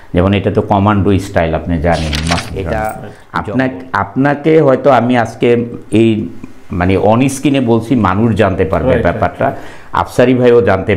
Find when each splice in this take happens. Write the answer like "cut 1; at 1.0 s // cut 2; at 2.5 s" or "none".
cut 1; at 2.5 s